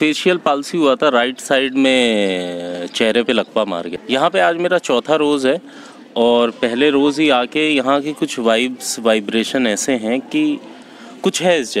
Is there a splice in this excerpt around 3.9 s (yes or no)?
yes